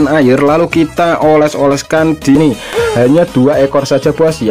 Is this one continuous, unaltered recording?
no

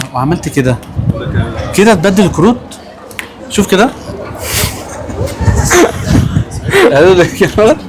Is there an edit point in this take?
no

